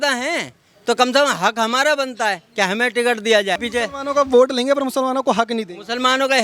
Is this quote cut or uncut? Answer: cut